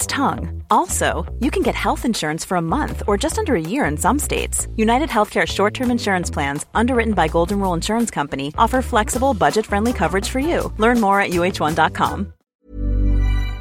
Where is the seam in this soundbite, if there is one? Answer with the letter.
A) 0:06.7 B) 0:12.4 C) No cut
B